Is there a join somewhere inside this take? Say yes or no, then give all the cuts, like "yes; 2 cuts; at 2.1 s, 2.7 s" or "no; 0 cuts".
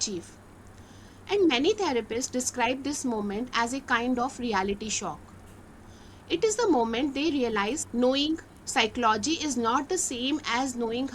yes; 1 cut; at 7.8 s